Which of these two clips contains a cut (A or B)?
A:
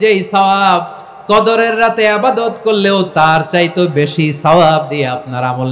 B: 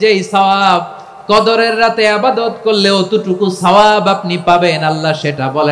A